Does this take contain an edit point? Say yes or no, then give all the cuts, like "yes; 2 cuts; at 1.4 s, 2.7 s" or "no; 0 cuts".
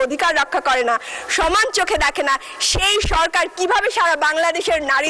no; 0 cuts